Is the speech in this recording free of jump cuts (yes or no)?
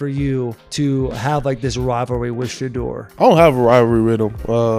yes